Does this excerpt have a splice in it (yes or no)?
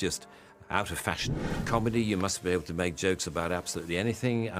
yes